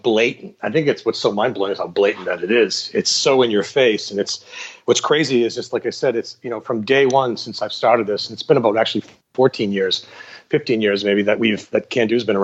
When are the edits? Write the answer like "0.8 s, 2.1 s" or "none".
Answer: none